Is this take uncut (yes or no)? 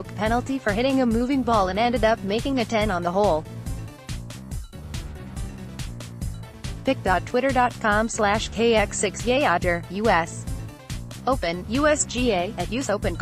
no